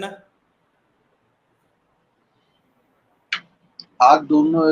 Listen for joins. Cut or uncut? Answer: uncut